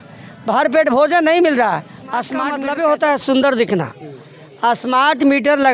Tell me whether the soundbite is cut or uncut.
cut